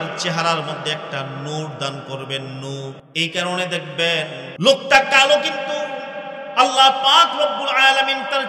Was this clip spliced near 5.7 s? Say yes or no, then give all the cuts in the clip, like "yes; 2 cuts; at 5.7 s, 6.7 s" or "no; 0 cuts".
no; 2 cuts; at 3.0 s, 4.4 s